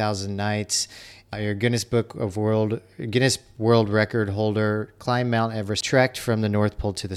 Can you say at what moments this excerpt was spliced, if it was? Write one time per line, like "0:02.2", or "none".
0:01.3
0:05.8